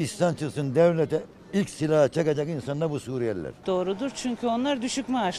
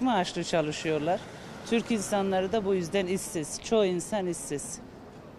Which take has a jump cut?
first; 1 cut; at 3.5 s

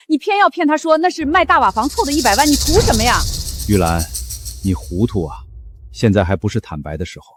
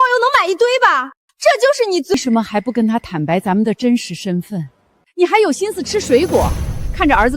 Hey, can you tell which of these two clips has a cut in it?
second; 1 cut; at 2.2 s

